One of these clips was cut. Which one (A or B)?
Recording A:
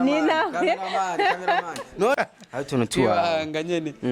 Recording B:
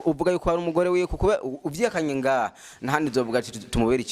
A